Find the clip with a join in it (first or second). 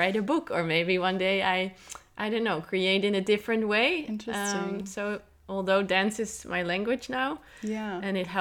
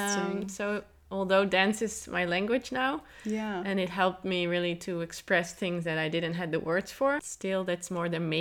second